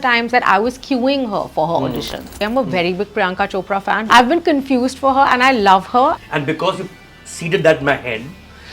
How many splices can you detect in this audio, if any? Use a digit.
3